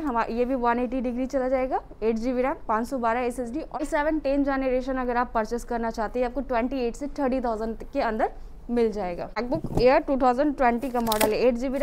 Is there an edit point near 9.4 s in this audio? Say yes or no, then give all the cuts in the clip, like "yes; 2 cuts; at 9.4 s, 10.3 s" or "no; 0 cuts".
yes; 2 cuts; at 3.8 s, 9.4 s